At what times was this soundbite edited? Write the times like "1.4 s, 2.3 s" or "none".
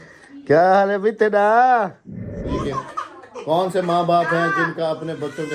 2.5 s